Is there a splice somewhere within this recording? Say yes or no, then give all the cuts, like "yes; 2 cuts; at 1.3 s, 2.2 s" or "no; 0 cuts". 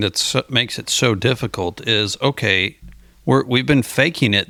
no; 0 cuts